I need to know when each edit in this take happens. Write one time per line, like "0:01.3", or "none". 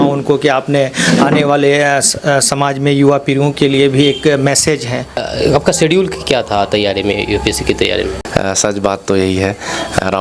0:05.3
0:08.2